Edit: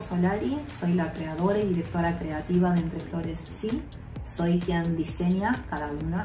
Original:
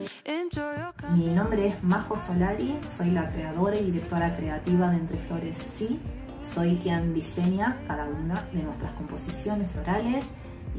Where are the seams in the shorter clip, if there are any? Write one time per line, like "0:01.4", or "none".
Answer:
none